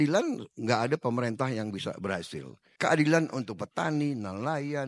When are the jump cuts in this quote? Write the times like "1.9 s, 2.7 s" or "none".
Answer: 2.7 s